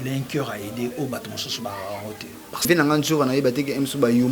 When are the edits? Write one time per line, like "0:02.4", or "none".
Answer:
0:02.6